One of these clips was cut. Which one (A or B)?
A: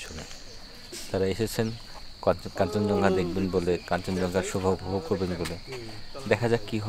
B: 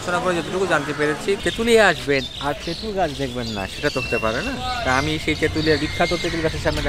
B